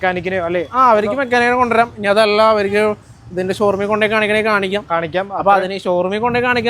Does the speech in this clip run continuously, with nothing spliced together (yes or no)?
yes